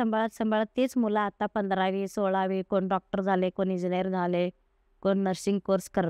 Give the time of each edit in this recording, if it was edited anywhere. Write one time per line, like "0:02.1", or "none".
none